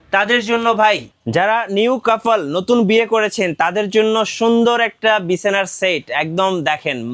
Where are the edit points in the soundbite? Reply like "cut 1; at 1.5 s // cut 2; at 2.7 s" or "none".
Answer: cut 1; at 1.1 s